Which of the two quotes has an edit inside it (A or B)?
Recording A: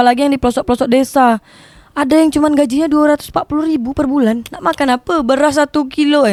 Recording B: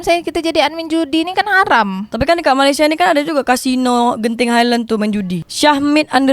B